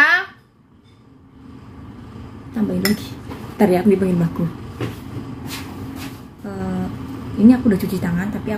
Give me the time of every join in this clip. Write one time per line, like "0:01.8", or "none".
0:06.3